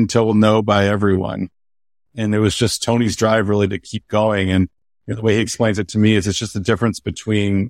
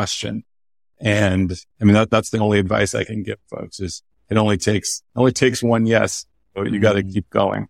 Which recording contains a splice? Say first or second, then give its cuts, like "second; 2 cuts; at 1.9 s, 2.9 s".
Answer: first; 1 cut; at 2.0 s